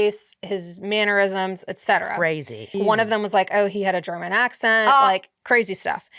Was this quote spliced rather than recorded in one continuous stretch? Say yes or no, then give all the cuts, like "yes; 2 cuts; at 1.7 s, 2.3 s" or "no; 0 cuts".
yes; 1 cut; at 2.8 s